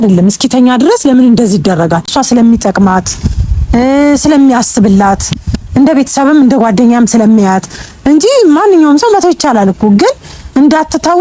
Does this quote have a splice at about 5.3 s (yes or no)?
no